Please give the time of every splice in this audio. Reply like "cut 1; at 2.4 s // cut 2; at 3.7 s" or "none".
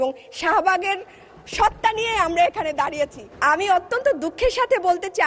cut 1; at 3.2 s